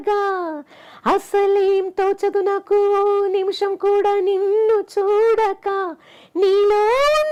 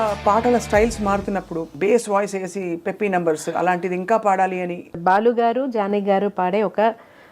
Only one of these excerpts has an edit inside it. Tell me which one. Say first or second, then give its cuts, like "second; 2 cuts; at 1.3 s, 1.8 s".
second; 2 cuts; at 1.7 s, 5.0 s